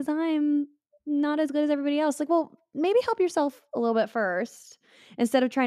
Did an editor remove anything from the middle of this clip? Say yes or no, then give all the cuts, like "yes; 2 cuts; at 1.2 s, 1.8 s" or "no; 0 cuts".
no; 0 cuts